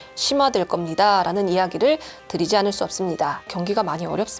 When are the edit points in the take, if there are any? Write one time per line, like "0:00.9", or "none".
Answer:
0:03.5